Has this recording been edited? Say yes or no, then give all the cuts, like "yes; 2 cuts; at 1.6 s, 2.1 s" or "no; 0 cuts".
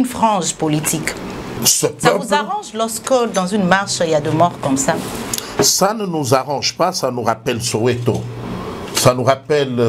yes; 1 cut; at 1.5 s